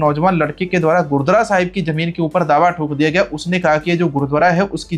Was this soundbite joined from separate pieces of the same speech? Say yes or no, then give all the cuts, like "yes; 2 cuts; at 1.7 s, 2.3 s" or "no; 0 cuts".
no; 0 cuts